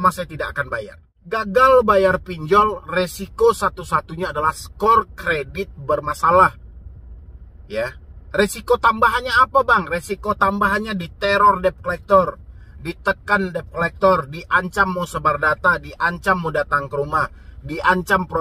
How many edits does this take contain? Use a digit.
1